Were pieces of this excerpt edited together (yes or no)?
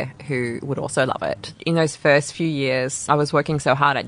yes